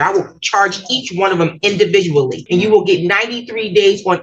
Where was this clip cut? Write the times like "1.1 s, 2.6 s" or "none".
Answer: 2.4 s